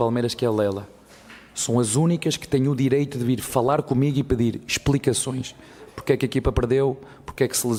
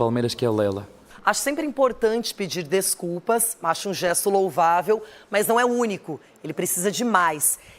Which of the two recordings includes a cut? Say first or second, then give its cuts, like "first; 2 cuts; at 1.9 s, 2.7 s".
second; 1 cut; at 1.1 s